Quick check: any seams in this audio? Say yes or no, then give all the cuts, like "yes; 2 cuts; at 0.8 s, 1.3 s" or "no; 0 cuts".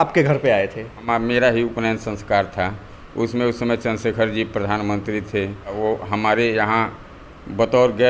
yes; 2 cuts; at 1.0 s, 5.8 s